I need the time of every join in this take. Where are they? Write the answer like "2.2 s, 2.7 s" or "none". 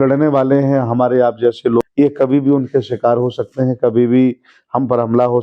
1.8 s